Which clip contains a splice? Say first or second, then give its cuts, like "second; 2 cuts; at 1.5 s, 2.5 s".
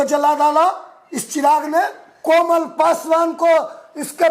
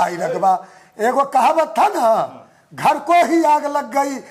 first; 1 cut; at 2.0 s